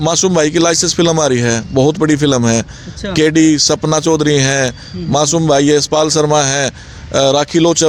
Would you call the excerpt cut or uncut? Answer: uncut